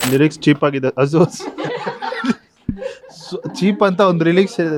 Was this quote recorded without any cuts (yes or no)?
yes